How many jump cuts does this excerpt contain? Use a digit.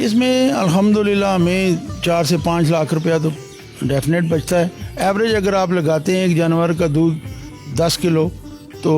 1